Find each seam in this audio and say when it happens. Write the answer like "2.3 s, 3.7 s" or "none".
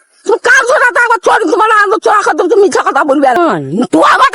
3.4 s

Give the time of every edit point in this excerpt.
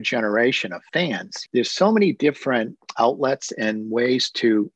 1.2 s

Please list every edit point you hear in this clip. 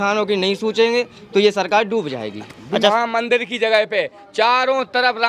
2.9 s

